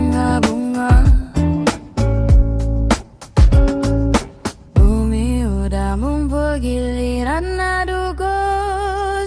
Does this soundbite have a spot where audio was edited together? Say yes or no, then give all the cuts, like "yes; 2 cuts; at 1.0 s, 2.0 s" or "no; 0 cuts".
no; 0 cuts